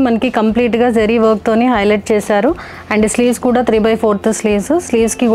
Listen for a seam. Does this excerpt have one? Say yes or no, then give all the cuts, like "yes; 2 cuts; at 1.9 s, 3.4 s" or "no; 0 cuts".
no; 0 cuts